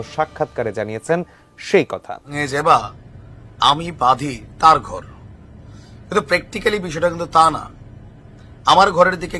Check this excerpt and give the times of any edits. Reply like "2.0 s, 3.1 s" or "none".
2.3 s